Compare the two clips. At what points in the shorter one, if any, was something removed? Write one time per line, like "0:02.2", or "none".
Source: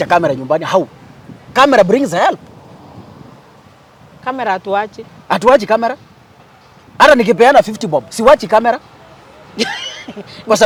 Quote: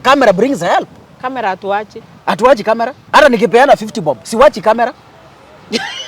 0:01.0
0:03.0